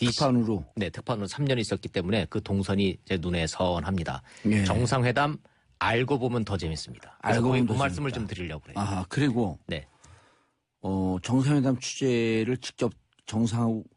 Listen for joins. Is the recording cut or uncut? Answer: uncut